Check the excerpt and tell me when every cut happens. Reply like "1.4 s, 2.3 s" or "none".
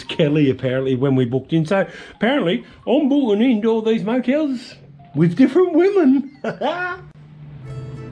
none

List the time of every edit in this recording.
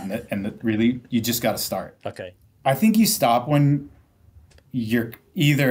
2.0 s

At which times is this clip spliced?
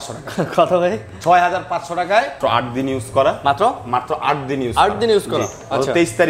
2.3 s

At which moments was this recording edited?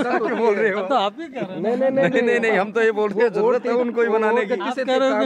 none

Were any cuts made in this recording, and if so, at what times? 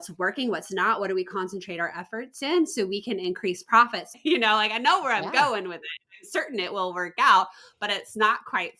4.0 s

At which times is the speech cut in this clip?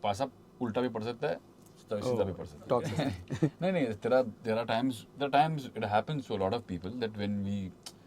2.9 s

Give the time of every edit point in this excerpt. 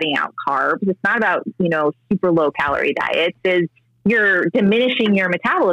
3.8 s

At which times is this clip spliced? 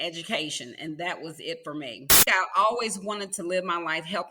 2.2 s

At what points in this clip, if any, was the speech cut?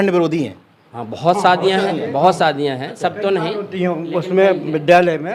none

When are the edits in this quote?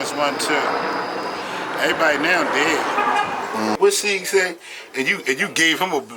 3.8 s

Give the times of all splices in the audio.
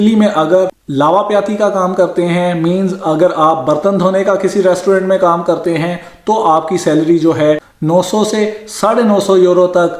none

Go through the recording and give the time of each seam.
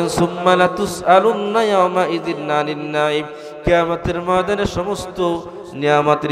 none

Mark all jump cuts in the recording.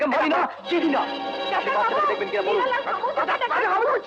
none

